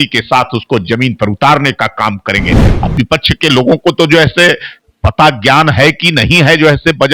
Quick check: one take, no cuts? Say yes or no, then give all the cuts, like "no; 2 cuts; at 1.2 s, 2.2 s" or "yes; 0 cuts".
no; 1 cut; at 2.6 s